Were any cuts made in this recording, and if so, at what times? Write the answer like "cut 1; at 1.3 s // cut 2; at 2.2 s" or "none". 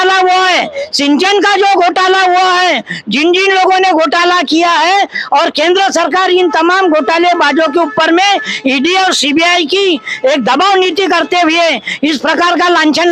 none